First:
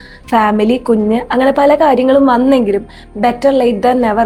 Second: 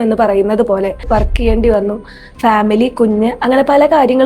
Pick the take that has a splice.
second; 1 cut; at 1.0 s

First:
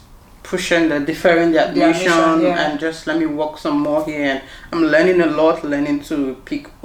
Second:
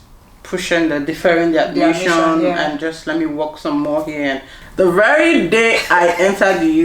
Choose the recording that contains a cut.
second; 1 cut; at 4.6 s

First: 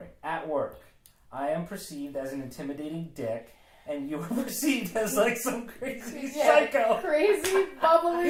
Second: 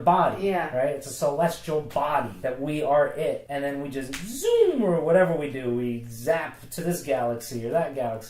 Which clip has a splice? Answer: second; 2 cuts; at 2.3 s, 3.5 s

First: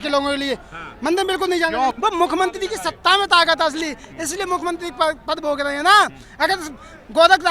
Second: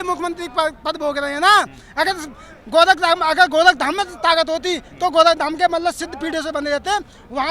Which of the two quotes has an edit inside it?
first; 1 cut; at 2.0 s

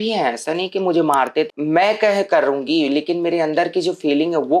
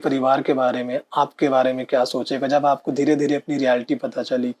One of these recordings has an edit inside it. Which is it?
first; 1 cut; at 1.5 s

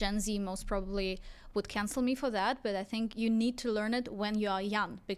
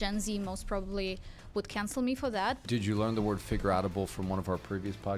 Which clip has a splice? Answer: second; 1 cut; at 2.6 s

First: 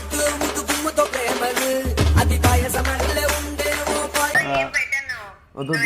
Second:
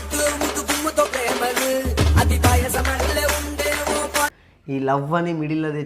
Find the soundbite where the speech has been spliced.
second; 1 cut; at 4.3 s

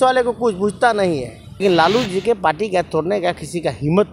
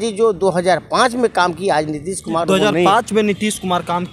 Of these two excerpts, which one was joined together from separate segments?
first; 1 cut; at 1.6 s

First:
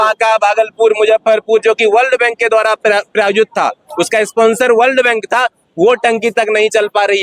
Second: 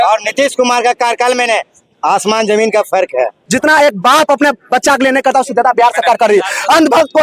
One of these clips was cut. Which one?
second; 1 cut; at 3.4 s

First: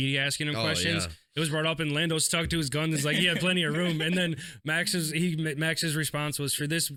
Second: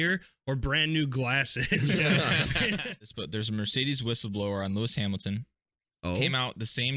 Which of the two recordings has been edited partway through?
second; 1 cut; at 2.9 s

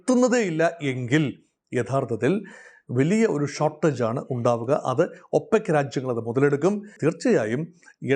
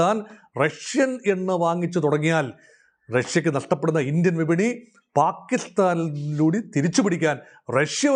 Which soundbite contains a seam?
first; 1 cut; at 6.9 s

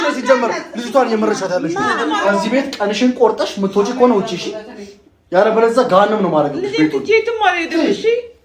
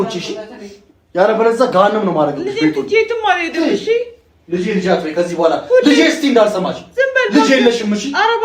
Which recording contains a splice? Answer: first; 1 cut; at 2.2 s

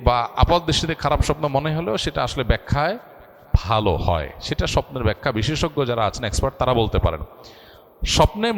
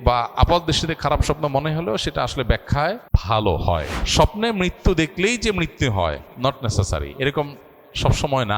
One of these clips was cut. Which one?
second; 2 cuts; at 3.1 s, 4.0 s

